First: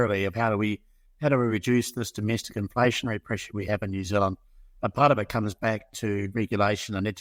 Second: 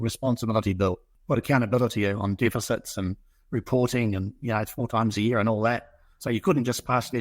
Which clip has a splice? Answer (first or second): second